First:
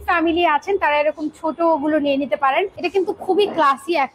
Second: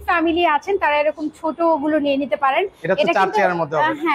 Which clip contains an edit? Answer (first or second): first